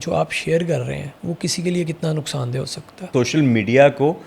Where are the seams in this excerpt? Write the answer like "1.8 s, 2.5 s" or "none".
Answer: 1.1 s, 3.1 s